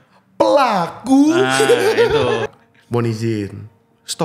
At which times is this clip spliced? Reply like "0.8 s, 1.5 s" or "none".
2.5 s